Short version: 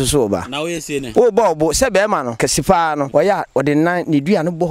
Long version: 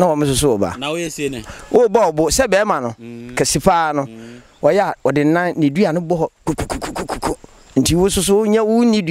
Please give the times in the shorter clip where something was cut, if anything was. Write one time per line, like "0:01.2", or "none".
0:01.0
0:02.7